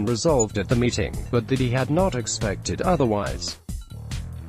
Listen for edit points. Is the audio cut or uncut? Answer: cut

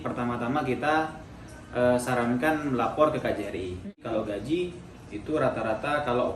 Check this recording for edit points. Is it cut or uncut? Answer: cut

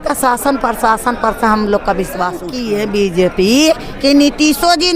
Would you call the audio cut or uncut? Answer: cut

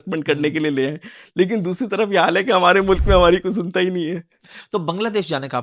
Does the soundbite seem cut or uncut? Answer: uncut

